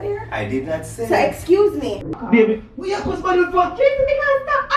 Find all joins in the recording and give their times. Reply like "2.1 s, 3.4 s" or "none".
2.0 s